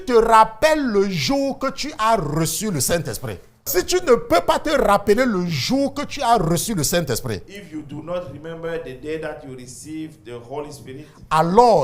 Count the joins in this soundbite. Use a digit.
1